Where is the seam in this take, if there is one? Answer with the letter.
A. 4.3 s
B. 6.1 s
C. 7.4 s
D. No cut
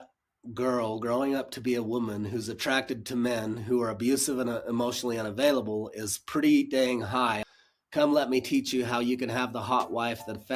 C